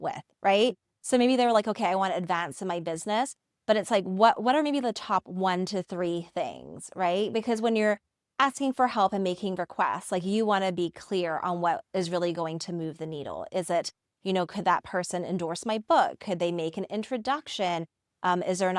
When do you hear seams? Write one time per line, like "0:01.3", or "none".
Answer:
none